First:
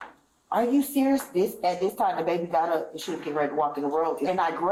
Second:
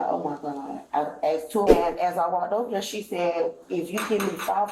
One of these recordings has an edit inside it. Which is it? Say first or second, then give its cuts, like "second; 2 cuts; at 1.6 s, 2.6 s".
second; 1 cut; at 1.7 s